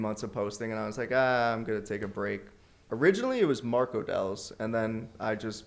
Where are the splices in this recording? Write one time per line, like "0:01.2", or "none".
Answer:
0:02.9